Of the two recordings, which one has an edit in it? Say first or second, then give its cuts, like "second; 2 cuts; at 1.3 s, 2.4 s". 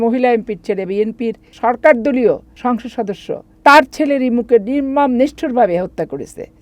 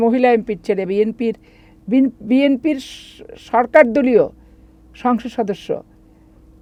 first; 2 cuts; at 1.5 s, 2.9 s